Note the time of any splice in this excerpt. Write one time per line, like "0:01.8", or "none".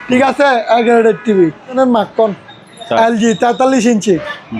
0:01.8